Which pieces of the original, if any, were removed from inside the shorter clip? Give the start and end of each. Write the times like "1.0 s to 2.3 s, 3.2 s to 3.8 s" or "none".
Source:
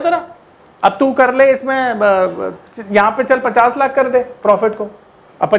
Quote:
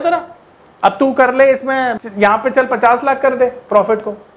1.9 s to 2.7 s